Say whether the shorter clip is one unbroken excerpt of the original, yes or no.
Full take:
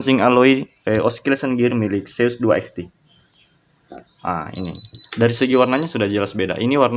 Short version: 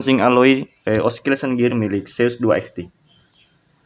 yes